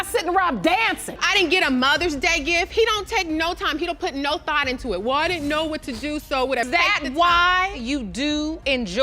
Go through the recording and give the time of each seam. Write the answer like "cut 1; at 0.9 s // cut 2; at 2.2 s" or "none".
cut 1; at 1.2 s